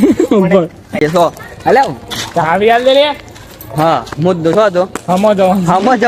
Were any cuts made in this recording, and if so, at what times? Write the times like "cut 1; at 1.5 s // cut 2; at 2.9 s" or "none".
cut 1; at 1.0 s